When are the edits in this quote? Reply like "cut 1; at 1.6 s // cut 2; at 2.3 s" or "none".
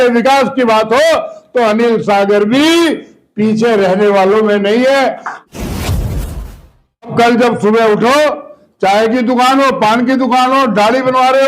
cut 1; at 5.3 s // cut 2; at 7.1 s